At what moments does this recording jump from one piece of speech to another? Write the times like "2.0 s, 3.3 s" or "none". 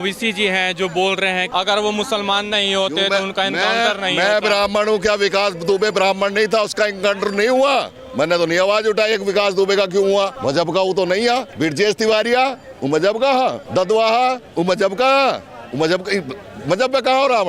1.5 s, 10.4 s, 11.5 s, 13.6 s